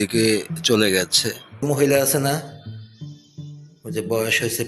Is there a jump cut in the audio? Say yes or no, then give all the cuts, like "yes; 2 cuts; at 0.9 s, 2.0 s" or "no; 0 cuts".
yes; 1 cut; at 1.6 s